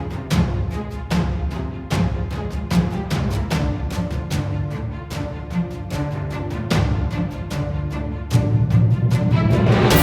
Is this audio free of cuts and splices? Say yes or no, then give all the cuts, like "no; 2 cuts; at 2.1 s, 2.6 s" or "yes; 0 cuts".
yes; 0 cuts